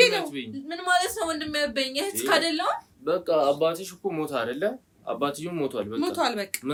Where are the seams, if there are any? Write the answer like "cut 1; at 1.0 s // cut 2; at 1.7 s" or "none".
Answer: none